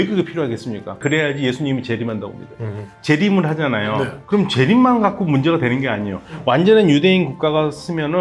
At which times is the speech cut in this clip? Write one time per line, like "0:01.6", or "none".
0:01.0
0:02.9